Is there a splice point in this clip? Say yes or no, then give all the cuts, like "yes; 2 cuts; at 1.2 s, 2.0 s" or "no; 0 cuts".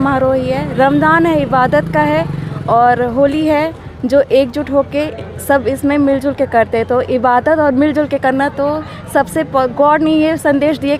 no; 0 cuts